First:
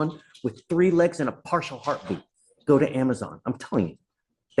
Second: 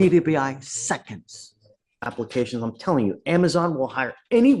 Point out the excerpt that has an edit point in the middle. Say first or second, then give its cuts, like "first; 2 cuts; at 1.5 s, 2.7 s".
second; 1 cut; at 2.3 s